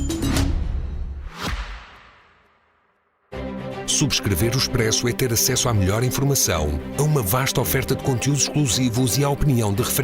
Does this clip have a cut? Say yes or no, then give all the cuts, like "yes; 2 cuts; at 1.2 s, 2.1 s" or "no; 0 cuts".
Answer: yes; 1 cut; at 1.2 s